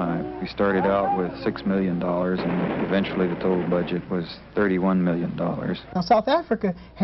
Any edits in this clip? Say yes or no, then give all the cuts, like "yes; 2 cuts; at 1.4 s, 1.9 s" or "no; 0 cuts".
yes; 1 cut; at 6.0 s